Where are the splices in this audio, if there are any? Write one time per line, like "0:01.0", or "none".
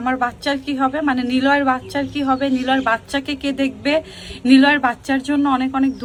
none